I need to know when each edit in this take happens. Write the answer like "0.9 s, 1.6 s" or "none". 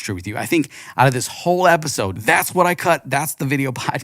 2.1 s